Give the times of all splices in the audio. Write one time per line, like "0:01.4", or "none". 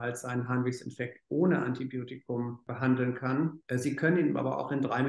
0:02.6
0:03.6